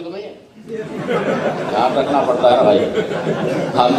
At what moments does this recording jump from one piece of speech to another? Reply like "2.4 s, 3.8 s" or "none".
none